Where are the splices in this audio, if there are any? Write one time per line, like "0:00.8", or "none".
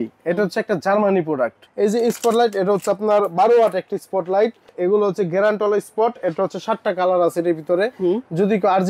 0:01.6
0:04.7